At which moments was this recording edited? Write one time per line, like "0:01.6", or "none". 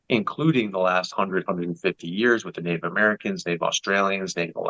none